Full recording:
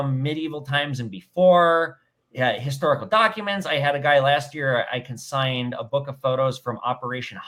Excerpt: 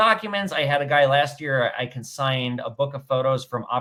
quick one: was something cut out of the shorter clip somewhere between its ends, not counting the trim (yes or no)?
no